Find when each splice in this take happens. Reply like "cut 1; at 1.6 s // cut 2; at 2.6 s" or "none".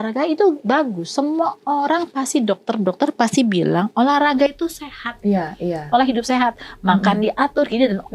none